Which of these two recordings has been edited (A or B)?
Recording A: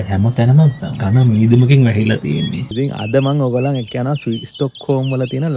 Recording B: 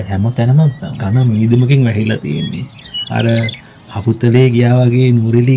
A